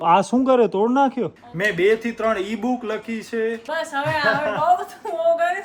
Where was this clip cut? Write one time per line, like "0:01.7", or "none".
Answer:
0:01.4
0:03.6